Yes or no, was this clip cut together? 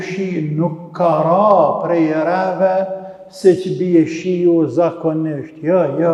no